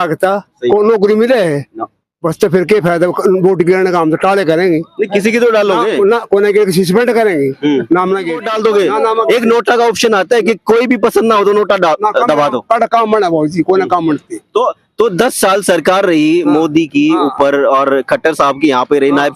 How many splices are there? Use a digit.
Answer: 1